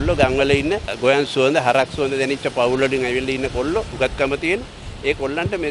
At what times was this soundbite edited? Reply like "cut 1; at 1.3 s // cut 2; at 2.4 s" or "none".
cut 1; at 0.9 s // cut 2; at 3.9 s